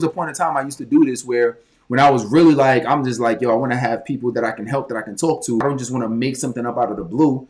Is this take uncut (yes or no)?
no